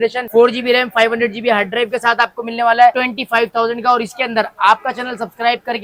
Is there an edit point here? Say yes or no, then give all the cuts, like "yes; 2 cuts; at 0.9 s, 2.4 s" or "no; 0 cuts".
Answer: no; 0 cuts